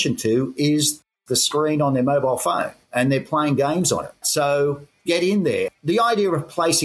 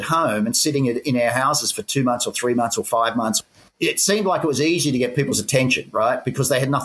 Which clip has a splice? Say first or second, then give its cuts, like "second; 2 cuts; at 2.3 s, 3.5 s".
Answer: first; 4 cuts; at 1.1 s, 4.2 s, 4.9 s, 5.7 s